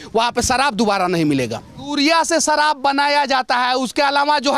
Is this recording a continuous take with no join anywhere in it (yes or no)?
no